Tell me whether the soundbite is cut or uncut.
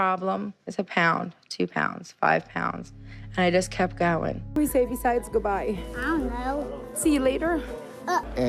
uncut